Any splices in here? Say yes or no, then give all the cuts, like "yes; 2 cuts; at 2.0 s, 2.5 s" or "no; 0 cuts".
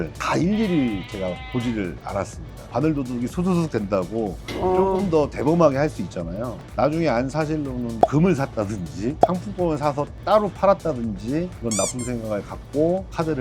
yes; 3 cuts; at 2.7 s, 7.9 s, 11.6 s